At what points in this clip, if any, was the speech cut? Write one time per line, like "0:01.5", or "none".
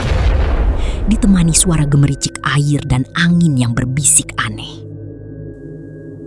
0:00.9